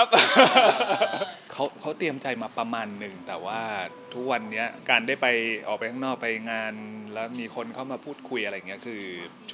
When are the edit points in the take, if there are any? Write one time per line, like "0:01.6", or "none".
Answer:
0:01.4
0:04.8